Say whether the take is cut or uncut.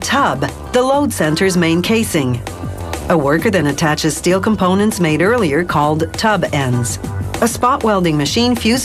cut